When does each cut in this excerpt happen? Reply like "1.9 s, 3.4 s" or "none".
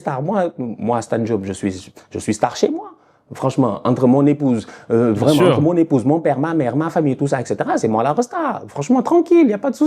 none